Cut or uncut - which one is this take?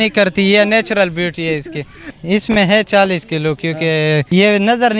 cut